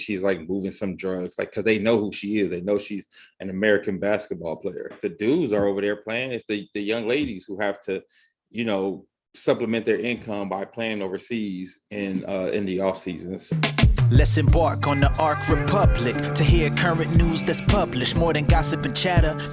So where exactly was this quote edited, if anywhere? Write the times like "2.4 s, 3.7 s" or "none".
5.0 s, 13.4 s